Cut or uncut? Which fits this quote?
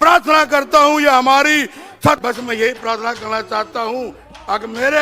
cut